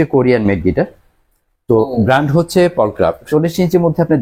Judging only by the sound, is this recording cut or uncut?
cut